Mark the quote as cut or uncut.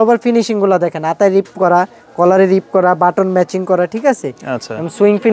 uncut